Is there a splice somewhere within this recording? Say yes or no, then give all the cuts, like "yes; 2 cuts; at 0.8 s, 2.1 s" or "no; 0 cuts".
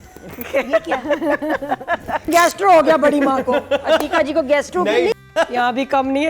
yes; 2 cuts; at 2.3 s, 5.1 s